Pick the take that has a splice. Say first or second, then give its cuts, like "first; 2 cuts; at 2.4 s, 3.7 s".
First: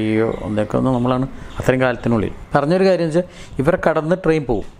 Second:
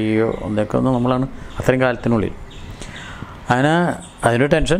first; 1 cut; at 2.4 s